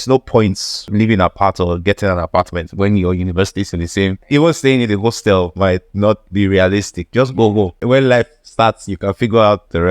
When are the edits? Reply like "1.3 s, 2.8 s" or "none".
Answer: 0.9 s, 4.2 s, 7.8 s